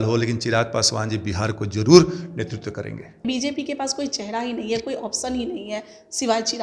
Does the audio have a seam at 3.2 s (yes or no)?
yes